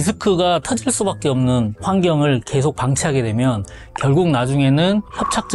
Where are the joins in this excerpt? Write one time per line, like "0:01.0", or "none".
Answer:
0:01.8